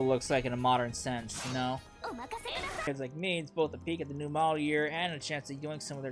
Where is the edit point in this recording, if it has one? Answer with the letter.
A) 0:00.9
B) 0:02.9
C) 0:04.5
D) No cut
B